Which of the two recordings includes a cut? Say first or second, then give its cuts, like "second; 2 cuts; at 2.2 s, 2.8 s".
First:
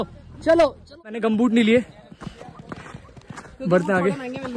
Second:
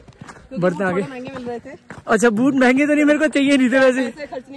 first; 1 cut; at 1.1 s